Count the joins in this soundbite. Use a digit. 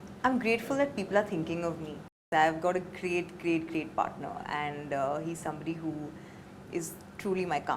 1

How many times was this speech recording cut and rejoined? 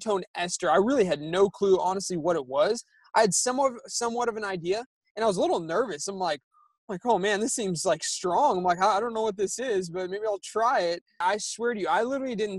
1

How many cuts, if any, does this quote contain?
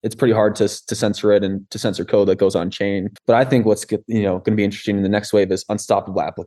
0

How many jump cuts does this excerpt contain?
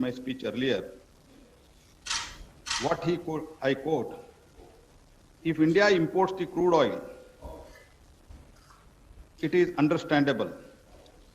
1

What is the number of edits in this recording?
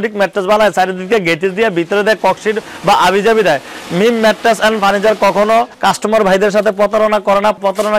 0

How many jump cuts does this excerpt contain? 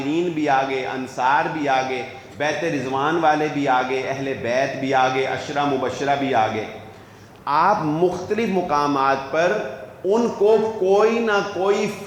0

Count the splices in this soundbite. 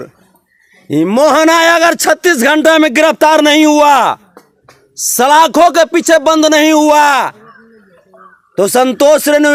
0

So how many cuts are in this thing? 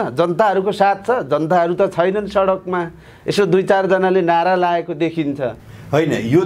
0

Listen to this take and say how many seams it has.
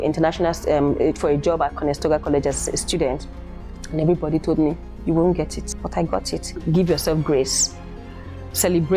2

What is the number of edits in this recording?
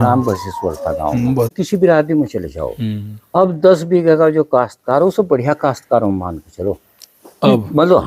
1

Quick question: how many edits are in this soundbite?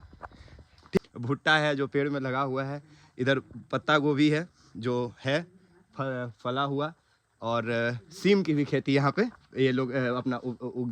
1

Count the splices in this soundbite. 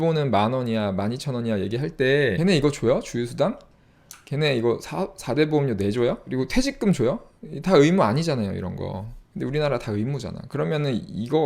2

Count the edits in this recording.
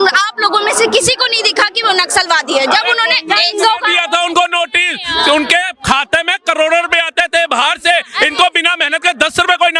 0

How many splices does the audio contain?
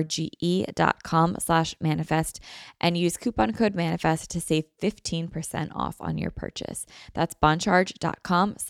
0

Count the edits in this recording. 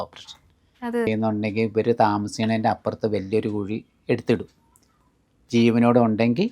1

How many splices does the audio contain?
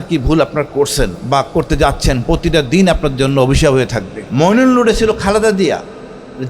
2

